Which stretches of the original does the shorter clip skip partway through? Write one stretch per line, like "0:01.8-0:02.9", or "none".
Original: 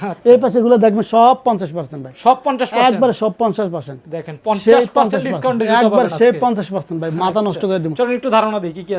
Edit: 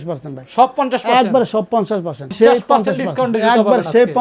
0:04.0-0:04.6